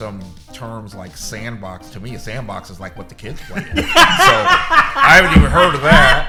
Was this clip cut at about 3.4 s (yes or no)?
no